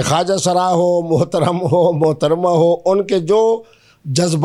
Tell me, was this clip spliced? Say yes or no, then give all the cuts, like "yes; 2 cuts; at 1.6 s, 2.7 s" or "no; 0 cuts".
no; 0 cuts